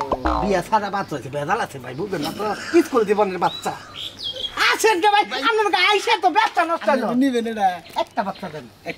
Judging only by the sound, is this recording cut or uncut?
uncut